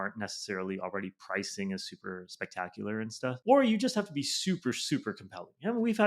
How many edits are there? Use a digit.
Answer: 1